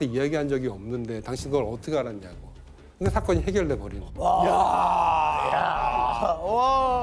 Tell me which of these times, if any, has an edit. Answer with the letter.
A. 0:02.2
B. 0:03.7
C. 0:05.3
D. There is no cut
D